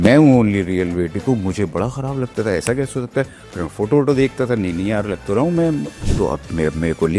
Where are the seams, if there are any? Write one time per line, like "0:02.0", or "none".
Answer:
0:06.0

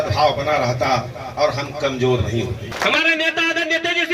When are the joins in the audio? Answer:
0:02.7

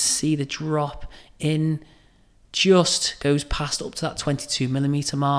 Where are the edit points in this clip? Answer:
none

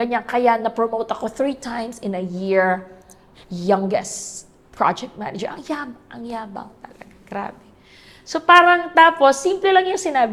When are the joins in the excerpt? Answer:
none

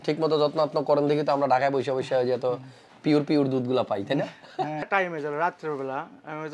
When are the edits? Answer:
0:04.9

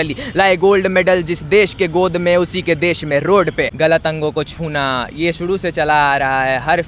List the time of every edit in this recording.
0:03.7

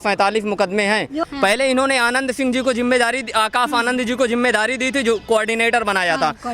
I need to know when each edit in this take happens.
0:01.2

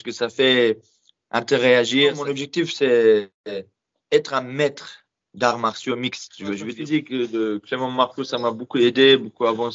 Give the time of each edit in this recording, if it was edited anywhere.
0:02.3
0:06.7

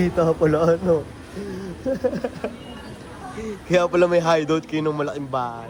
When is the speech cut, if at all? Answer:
none

